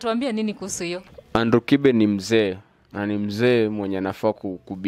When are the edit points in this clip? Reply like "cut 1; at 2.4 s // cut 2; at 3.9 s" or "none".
cut 1; at 1.1 s